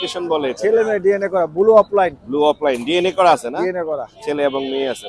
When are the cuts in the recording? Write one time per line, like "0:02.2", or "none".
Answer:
none